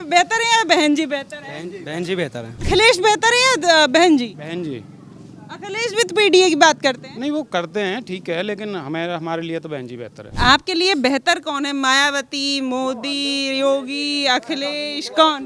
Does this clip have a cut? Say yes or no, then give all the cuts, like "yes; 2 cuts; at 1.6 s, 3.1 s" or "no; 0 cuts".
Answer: yes; 2 cuts; at 2.6 s, 10.3 s